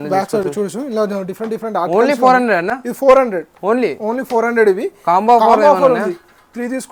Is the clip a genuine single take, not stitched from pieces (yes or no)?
yes